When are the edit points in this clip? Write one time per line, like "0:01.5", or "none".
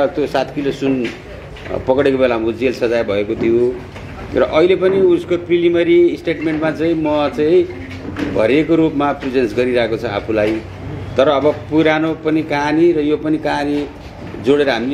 none

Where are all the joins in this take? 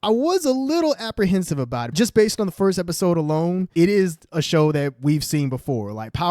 0:01.9
0:03.7

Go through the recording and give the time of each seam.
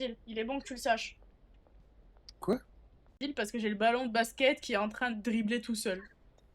0:03.2

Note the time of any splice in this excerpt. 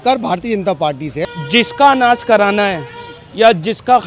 0:01.2

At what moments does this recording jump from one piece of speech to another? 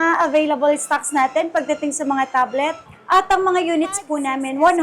0:02.9

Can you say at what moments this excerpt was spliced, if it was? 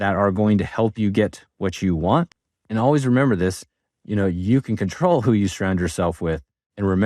0:02.3

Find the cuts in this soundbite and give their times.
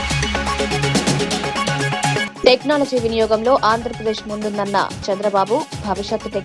0:02.3

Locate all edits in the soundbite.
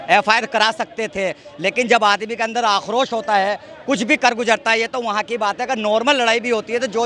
none

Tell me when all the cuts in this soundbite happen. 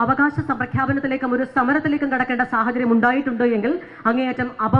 none

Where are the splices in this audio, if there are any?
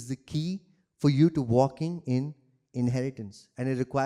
none

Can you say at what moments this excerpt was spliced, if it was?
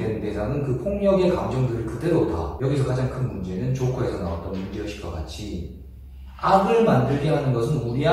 0:02.5

